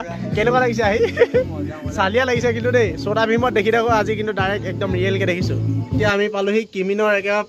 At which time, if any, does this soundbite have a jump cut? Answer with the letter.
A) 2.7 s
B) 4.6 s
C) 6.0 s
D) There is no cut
C